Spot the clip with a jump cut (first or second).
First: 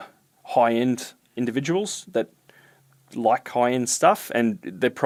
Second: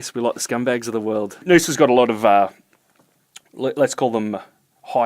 second